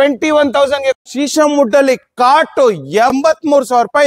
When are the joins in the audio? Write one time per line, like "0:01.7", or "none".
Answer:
0:01.0
0:03.1